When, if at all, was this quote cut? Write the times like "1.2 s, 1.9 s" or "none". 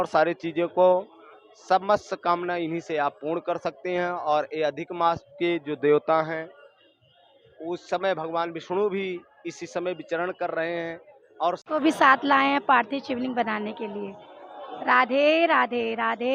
11.6 s